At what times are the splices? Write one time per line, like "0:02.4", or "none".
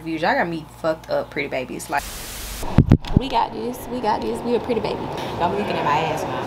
0:02.2
0:05.2

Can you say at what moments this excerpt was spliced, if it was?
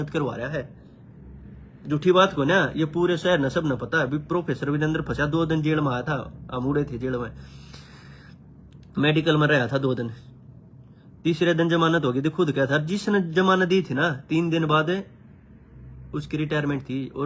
none

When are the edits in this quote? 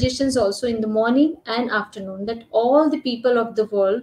none

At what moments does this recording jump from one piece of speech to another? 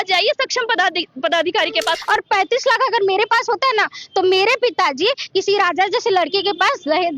0:02.0

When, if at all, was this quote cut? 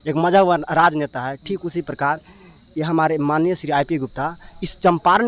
none

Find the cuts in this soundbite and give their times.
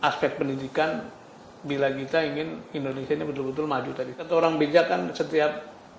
0:04.1

